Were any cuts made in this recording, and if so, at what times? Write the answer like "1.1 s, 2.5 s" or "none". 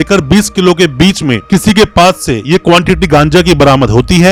none